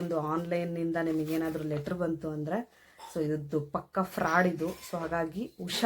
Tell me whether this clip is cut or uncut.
uncut